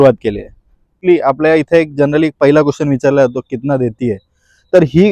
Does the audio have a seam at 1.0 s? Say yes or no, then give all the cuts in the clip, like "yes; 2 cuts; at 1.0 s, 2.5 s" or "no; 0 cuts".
yes; 1 cut; at 1.0 s